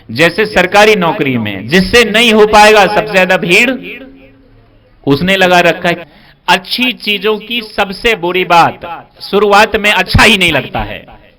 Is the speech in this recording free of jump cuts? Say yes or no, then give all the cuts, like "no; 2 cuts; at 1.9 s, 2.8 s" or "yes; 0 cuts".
no; 1 cut; at 6.0 s